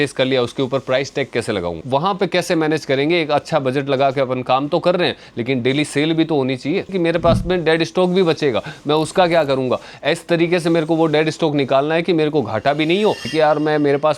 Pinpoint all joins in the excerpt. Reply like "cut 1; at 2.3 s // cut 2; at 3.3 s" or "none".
cut 1; at 1.8 s // cut 2; at 6.9 s // cut 3; at 13.3 s